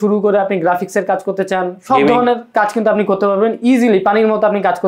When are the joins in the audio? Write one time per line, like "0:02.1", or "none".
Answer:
none